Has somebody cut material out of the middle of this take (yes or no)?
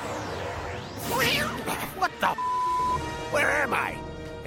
no